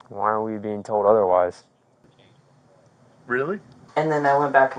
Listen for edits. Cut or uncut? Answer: cut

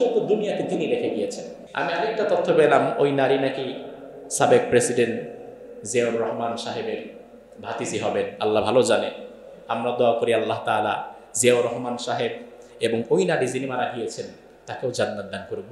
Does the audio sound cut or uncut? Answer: cut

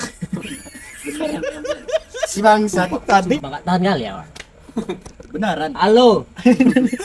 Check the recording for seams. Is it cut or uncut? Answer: cut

